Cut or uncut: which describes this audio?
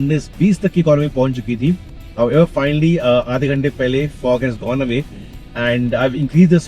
uncut